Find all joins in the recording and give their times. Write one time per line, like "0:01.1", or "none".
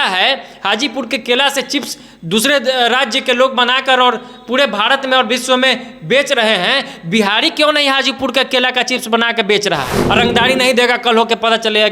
0:10.0